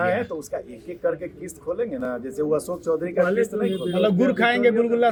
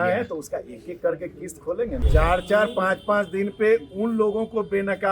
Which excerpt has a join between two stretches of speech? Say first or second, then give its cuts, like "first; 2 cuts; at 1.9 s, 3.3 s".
second; 1 cut; at 2.0 s